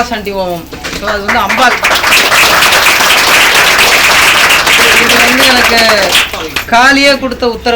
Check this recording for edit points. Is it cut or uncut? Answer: uncut